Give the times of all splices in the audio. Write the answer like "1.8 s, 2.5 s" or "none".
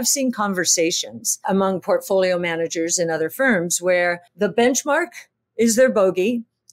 1.4 s, 4.2 s